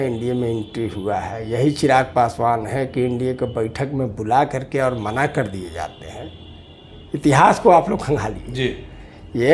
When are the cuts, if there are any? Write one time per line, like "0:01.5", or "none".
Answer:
none